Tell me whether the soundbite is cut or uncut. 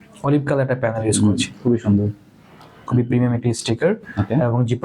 cut